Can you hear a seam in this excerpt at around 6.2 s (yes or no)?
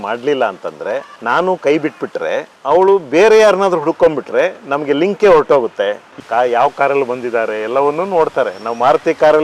yes